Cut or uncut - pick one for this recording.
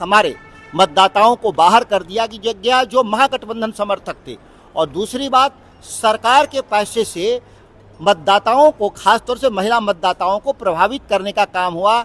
uncut